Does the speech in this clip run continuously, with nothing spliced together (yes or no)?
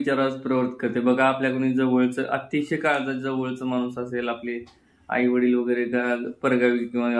yes